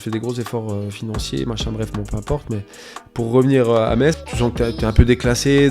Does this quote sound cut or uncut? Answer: cut